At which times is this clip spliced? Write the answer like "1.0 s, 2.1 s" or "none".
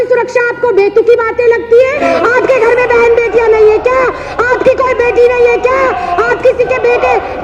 2.0 s